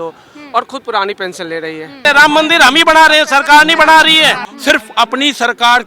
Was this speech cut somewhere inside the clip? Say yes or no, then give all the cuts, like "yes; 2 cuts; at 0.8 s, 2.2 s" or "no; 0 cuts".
yes; 2 cuts; at 2.0 s, 4.5 s